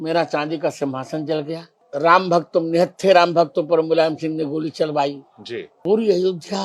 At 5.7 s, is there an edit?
yes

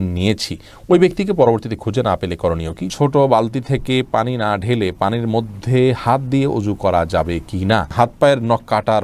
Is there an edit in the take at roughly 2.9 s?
yes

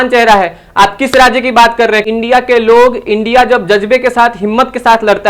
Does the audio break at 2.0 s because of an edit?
yes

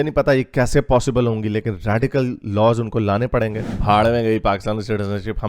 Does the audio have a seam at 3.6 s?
yes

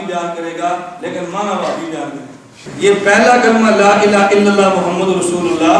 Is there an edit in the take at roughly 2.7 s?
yes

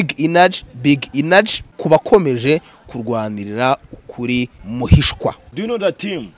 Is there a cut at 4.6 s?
yes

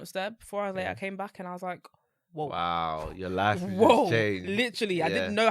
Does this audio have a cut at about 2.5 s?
no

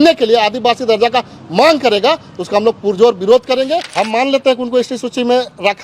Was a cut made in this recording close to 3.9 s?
yes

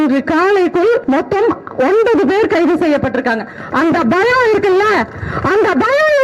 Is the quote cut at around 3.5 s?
no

